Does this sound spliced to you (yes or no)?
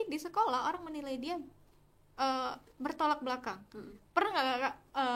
no